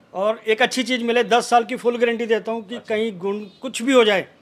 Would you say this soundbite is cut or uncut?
uncut